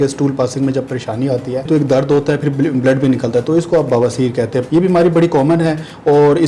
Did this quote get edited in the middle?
yes; 2 cuts; at 1.7 s, 4.7 s

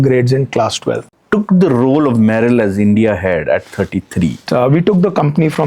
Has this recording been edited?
yes; 2 cuts; at 1.1 s, 4.4 s

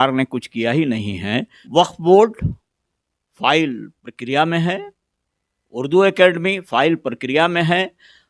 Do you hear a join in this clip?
yes; 1 cut; at 1.6 s

